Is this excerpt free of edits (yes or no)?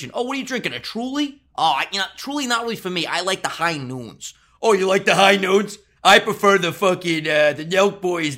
yes